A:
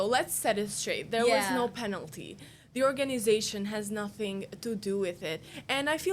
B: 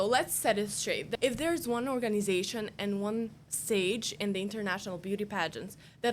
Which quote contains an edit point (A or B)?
B